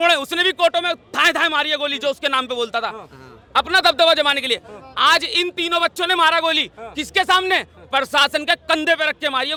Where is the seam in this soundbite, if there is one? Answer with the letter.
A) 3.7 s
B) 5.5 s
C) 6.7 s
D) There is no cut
D